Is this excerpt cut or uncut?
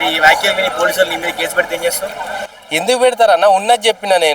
uncut